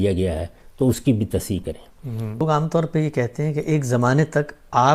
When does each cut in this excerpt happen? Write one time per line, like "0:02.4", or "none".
0:02.4